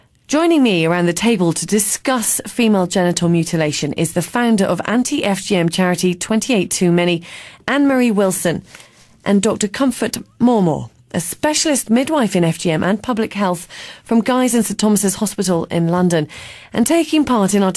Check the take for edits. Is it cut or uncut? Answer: uncut